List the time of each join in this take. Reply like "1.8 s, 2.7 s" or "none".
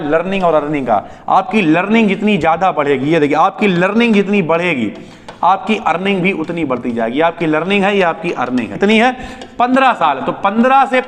8.7 s